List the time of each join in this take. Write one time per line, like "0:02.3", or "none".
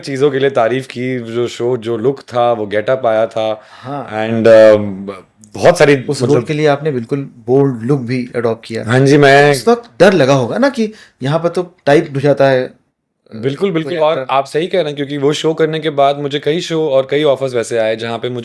none